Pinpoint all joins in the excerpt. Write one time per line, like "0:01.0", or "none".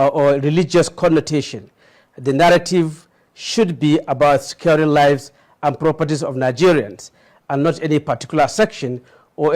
none